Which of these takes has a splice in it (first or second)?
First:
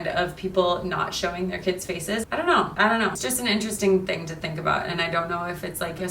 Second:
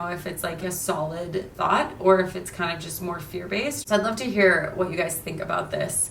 first